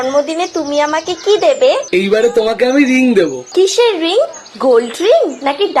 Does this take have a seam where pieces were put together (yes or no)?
no